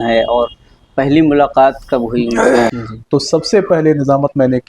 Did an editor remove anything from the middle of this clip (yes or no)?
yes